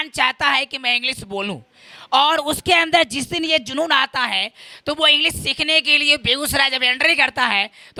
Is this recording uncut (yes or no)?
yes